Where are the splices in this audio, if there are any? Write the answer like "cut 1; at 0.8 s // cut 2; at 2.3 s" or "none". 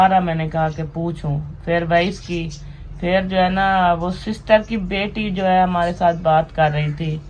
none